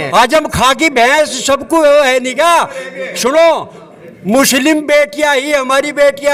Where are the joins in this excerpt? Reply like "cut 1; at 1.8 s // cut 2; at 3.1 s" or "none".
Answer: none